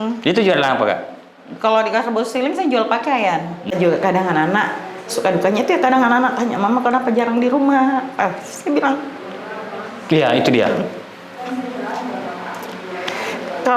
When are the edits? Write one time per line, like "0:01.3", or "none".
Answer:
0:03.7